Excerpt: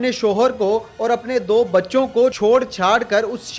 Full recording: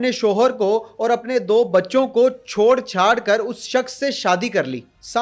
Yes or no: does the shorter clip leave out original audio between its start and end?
yes